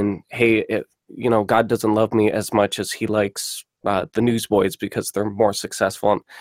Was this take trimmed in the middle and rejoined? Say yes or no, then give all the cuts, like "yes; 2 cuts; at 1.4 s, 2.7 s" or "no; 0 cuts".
no; 0 cuts